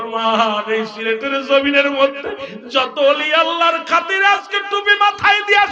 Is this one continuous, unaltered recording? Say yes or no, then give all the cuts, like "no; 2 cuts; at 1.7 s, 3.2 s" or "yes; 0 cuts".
yes; 0 cuts